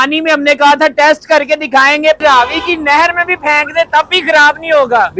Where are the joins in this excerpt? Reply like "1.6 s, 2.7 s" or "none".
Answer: 2.2 s